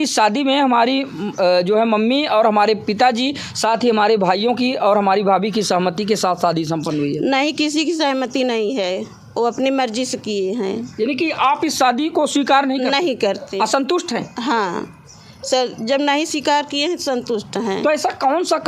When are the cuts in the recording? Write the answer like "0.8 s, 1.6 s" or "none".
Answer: none